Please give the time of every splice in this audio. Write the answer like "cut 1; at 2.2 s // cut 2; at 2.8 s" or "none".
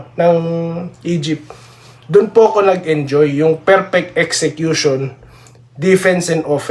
none

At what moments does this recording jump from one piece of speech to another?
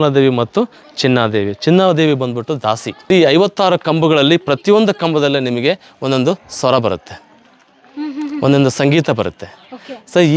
cut 1; at 2.9 s

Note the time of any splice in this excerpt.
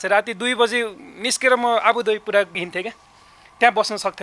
cut 1; at 2.6 s

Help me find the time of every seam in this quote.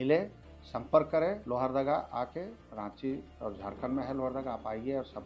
cut 1; at 1.4 s // cut 2; at 2.6 s // cut 3; at 3.3 s

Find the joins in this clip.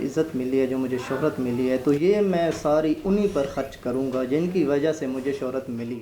none

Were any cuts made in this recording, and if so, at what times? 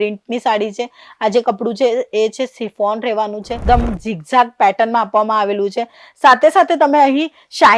cut 1; at 3.5 s

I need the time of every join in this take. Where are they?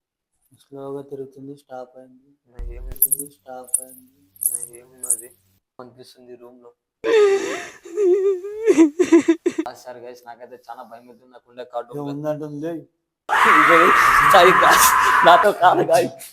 cut 1; at 5.8 s // cut 2; at 9.7 s

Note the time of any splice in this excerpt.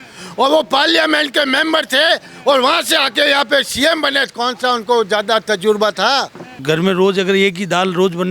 cut 1; at 6.5 s

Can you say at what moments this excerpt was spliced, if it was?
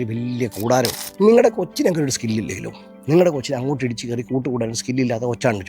cut 1; at 1.0 s

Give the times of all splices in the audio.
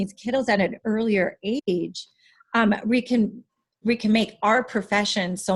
none

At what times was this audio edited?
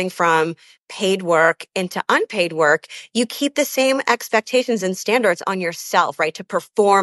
none

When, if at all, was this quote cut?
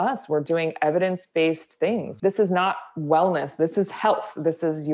cut 1; at 2.1 s

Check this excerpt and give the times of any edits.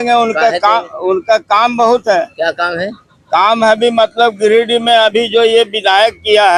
none

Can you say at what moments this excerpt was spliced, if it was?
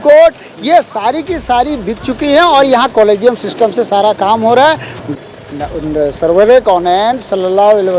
cut 1; at 5.1 s

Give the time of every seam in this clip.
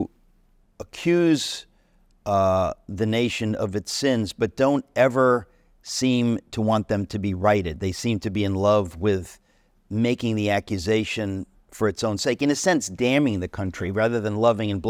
none

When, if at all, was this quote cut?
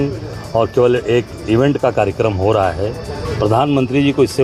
none

